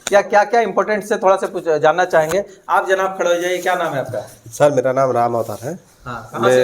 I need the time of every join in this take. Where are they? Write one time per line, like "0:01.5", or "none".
none